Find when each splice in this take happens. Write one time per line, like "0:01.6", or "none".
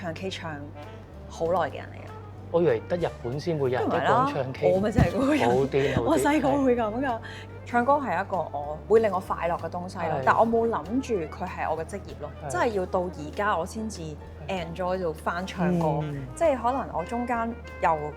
none